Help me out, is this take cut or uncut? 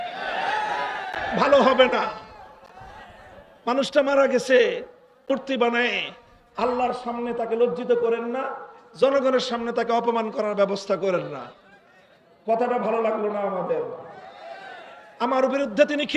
cut